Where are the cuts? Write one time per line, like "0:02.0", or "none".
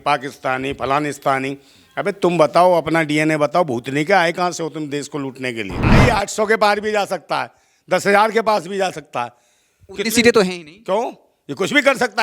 0:05.9